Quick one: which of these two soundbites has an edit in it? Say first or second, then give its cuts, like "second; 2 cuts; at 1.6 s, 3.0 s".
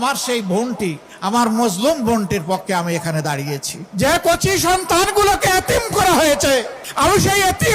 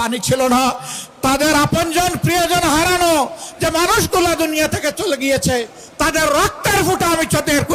first; 3 cuts; at 1.1 s, 3.8 s, 6.8 s